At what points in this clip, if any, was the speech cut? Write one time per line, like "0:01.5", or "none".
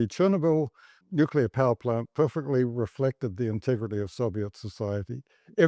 0:01.0